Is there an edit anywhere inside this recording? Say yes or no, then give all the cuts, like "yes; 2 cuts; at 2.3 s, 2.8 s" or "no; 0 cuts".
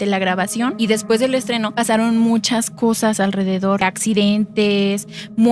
yes; 3 cuts; at 0.7 s, 1.7 s, 3.8 s